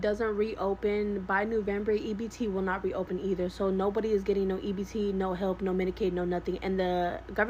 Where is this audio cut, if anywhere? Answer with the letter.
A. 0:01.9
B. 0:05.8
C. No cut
C